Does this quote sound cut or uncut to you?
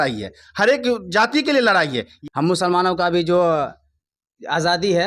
cut